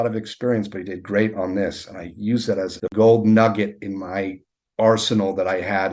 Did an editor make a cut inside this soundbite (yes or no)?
yes